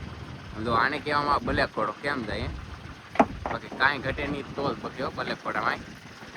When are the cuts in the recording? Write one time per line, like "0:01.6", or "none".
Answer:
none